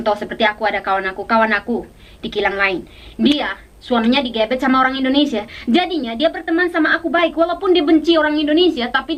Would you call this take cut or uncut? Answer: uncut